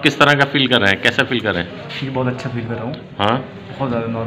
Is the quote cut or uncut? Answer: uncut